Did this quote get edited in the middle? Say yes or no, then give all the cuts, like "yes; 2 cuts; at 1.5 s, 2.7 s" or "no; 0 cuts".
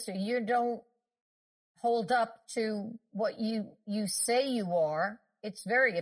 no; 0 cuts